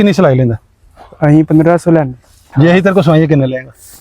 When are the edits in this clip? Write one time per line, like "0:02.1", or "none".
0:02.4